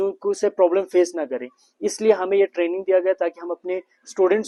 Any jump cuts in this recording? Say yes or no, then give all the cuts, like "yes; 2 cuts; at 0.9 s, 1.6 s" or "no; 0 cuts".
no; 0 cuts